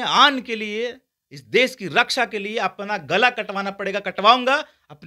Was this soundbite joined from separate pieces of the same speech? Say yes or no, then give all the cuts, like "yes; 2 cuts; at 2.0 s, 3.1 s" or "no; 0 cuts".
no; 0 cuts